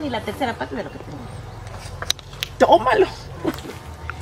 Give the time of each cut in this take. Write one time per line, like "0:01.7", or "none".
none